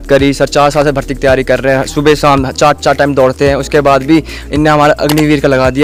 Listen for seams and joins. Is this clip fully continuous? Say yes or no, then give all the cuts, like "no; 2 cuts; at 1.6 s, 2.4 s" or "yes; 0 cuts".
yes; 0 cuts